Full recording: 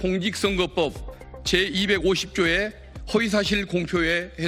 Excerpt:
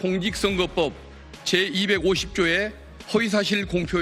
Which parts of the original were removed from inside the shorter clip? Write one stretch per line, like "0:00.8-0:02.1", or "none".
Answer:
none